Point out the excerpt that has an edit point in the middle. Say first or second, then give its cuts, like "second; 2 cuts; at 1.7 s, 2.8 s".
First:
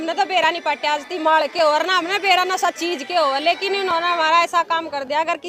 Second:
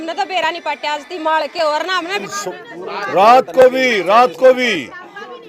second; 1 cut; at 2.2 s